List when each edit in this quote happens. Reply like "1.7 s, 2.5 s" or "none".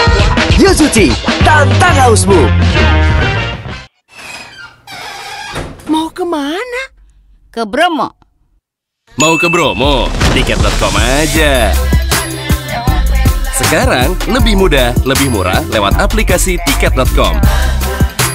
3.5 s